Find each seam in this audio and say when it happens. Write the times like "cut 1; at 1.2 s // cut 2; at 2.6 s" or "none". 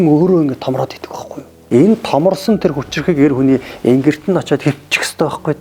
cut 1; at 1.5 s